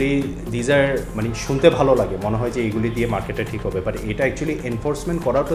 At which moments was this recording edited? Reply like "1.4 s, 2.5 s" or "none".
none